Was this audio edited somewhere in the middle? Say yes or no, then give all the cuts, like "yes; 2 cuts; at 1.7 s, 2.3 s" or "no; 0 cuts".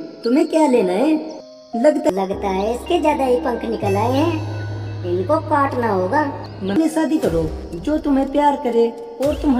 yes; 2 cuts; at 2.1 s, 6.7 s